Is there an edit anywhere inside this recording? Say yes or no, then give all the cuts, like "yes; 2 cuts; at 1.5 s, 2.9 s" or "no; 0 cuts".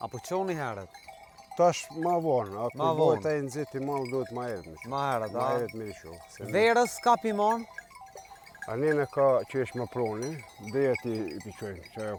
no; 0 cuts